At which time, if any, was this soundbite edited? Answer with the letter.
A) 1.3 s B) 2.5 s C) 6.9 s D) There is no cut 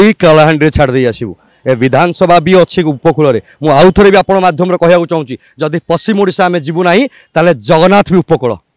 D